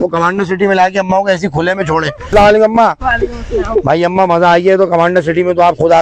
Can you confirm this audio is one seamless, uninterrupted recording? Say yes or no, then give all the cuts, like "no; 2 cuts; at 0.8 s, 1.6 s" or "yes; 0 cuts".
no; 1 cut; at 2.3 s